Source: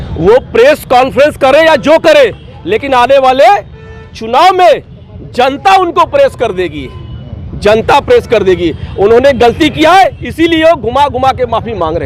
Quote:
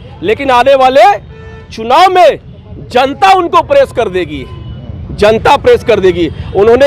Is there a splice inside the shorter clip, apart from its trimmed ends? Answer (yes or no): no